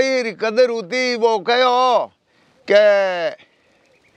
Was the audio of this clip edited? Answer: no; 0 cuts

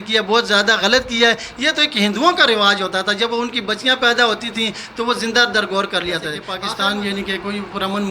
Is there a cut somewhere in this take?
yes; 1 cut; at 6.5 s

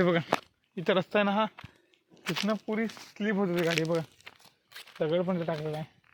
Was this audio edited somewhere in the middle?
no; 0 cuts

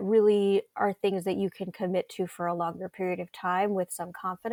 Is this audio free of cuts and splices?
yes; 0 cuts

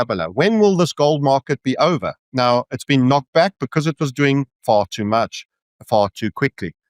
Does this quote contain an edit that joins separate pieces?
yes; 1 cut; at 2.2 s

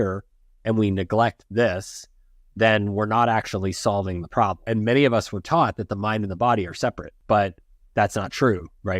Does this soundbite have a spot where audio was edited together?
yes; 2 cuts; at 4.6 s, 7.1 s

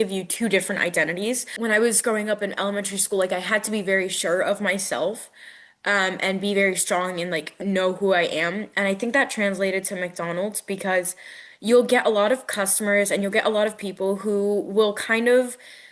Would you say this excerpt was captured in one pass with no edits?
no; 1 cut; at 1.5 s

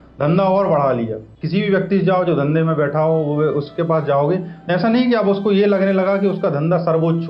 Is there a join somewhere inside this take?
no; 0 cuts

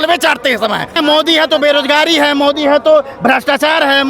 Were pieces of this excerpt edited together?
yes; 1 cut; at 1.0 s

